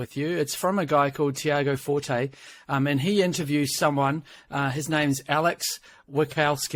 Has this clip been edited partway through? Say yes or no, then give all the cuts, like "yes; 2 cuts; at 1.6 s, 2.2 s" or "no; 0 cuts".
no; 0 cuts